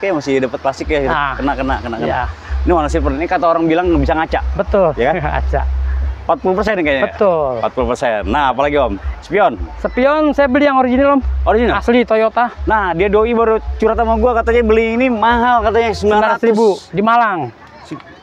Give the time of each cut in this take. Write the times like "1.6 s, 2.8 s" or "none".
none

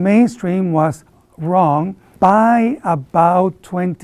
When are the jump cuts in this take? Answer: none

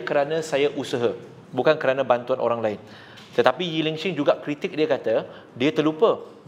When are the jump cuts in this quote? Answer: none

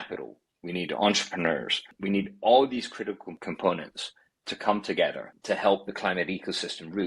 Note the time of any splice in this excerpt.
1.9 s, 3.3 s

